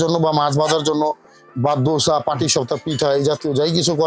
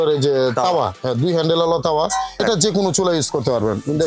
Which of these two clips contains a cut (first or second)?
second